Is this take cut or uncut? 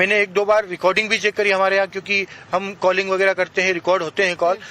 cut